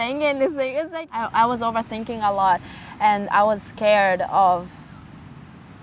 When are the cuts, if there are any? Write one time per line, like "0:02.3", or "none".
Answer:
0:01.0